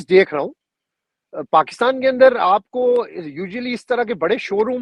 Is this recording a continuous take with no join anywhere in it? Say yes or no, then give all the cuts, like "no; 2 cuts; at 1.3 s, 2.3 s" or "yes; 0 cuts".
yes; 0 cuts